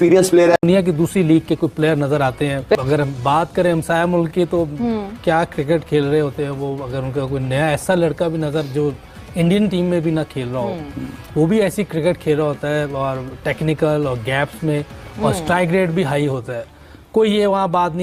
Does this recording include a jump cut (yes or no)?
no